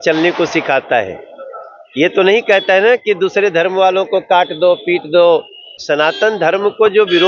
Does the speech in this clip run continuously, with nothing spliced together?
no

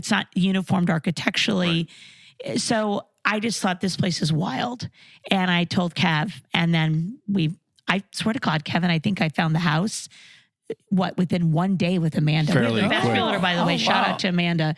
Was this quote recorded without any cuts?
yes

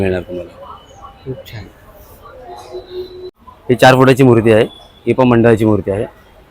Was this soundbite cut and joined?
yes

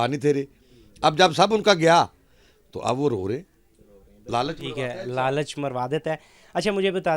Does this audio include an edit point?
no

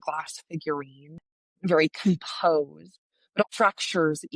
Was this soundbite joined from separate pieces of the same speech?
yes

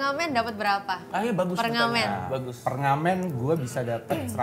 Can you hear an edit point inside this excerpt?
no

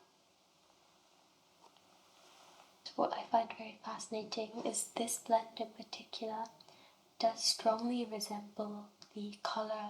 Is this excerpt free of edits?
no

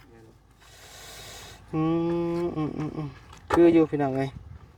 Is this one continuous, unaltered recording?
yes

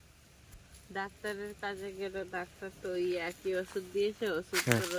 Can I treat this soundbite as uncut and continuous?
yes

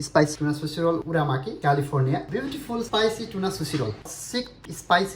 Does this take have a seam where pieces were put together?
yes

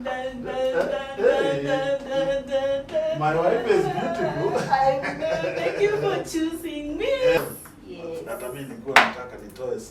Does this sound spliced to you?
yes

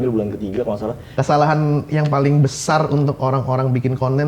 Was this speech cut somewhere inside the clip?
yes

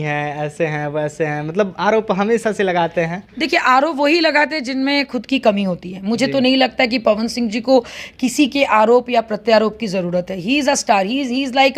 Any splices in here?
no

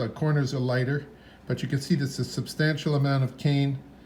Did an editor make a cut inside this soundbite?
no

